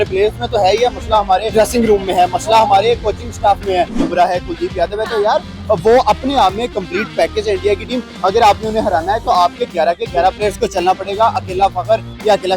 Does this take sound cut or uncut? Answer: cut